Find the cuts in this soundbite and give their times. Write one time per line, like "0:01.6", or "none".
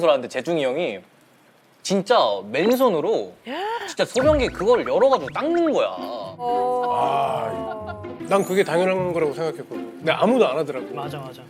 0:08.1